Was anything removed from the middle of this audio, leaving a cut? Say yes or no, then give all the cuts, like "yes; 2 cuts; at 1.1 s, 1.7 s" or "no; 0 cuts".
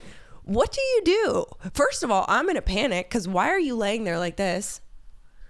no; 0 cuts